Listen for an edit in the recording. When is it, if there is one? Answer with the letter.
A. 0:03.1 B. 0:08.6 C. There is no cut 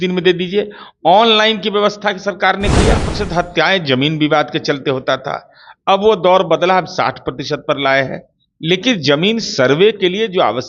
A